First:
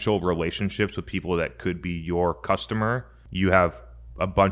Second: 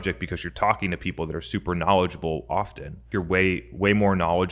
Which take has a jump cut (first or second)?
second